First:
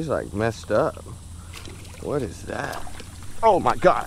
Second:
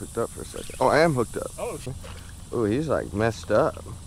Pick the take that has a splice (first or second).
second